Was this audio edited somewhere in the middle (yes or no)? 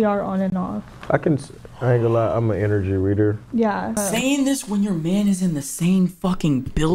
yes